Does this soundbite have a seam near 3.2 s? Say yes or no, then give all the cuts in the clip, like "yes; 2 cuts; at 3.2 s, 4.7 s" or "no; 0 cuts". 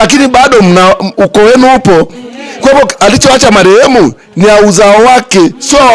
no; 0 cuts